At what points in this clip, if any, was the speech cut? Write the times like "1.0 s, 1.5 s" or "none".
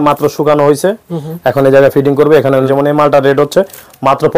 2.7 s

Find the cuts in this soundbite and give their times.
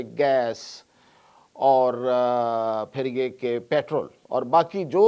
4.2 s

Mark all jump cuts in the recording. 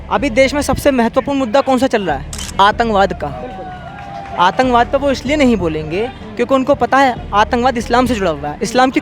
2.4 s

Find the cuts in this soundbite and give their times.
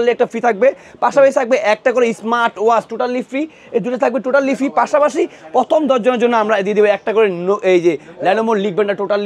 none

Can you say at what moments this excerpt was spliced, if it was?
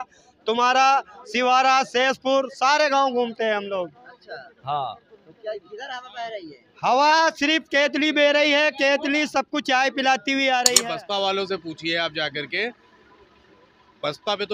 10.8 s

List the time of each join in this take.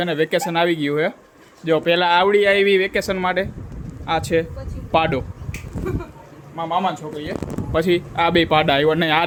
none

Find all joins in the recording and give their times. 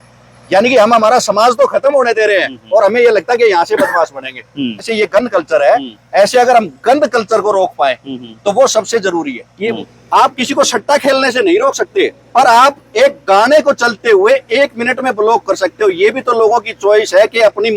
4.9 s, 9.7 s

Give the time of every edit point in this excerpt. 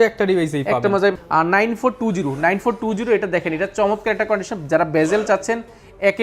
1.1 s

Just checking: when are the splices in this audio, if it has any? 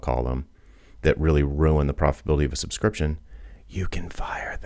none

